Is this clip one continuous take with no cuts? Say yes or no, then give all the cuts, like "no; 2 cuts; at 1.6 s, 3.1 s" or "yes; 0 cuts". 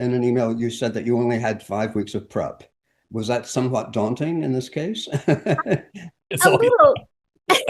yes; 0 cuts